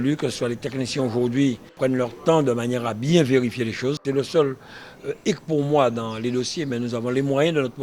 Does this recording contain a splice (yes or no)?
yes